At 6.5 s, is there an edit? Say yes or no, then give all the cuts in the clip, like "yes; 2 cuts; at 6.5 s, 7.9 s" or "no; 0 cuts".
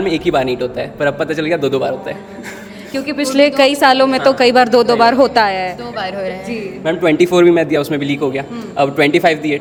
no; 0 cuts